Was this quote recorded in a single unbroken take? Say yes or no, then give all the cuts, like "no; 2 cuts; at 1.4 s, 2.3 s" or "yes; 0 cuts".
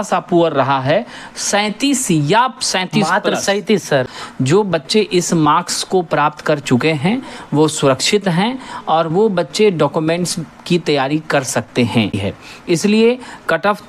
no; 2 cuts; at 4.0 s, 12.2 s